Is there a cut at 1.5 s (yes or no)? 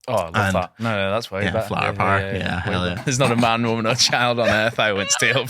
no